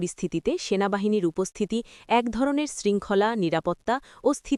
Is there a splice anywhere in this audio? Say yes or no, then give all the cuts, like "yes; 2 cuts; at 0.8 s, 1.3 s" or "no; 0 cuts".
no; 0 cuts